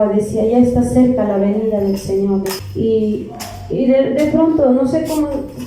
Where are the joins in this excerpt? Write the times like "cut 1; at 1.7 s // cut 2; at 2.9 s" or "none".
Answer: cut 1; at 2.6 s

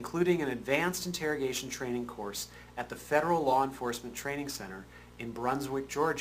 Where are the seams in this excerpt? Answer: cut 1; at 3.5 s

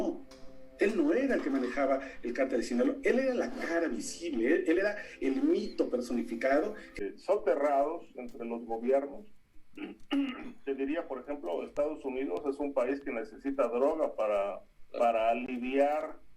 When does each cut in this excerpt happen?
cut 1; at 6.9 s

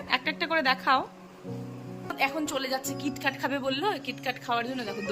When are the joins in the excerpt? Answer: cut 1; at 2.0 s

